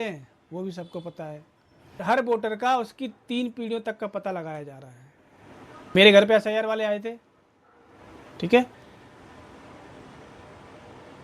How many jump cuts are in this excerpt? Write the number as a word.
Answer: two